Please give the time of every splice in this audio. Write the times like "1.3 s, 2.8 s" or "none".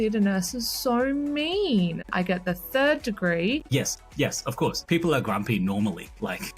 2.1 s, 3.7 s, 4.8 s

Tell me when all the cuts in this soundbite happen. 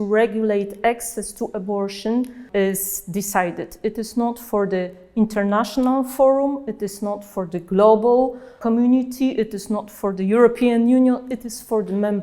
2.4 s, 8.6 s

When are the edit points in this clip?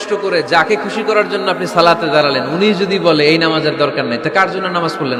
none

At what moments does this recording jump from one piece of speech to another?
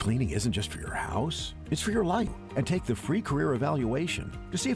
2.4 s

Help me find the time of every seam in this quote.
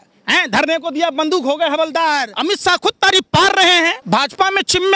2.3 s, 4.0 s

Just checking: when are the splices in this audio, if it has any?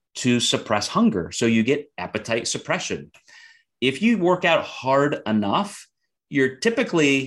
none

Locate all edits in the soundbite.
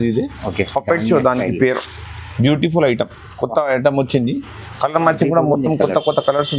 none

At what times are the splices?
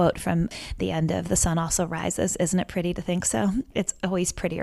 3.7 s

